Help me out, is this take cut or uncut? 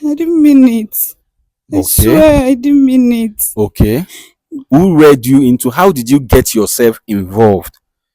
cut